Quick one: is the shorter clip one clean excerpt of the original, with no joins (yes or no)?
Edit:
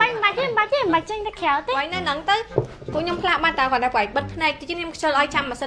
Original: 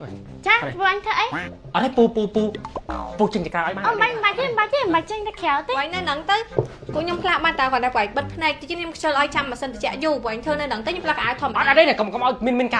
yes